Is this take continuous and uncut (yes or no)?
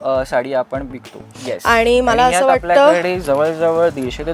no